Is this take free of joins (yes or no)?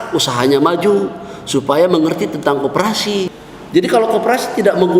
no